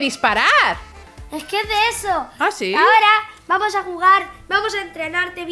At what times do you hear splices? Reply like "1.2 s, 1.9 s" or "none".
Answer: none